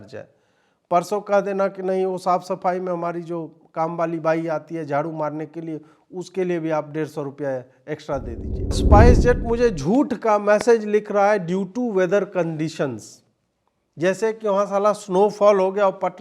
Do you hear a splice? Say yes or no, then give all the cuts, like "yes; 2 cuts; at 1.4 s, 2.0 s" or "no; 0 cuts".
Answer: yes; 1 cut; at 8.8 s